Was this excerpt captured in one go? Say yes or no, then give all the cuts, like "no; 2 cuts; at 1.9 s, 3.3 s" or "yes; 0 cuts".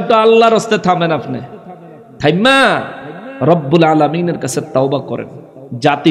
yes; 0 cuts